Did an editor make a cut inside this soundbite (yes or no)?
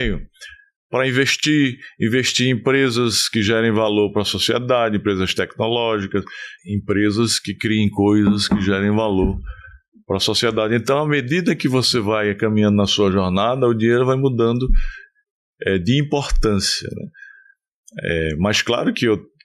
yes